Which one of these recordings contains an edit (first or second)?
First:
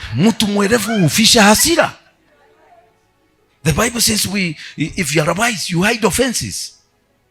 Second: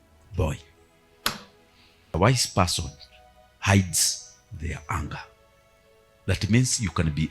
second